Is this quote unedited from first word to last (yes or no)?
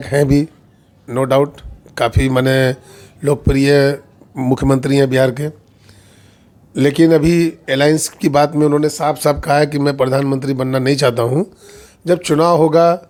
yes